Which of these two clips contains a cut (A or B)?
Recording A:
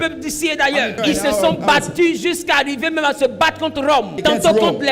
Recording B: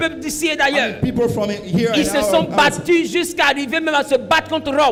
A